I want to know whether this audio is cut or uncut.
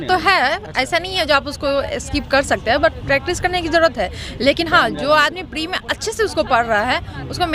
uncut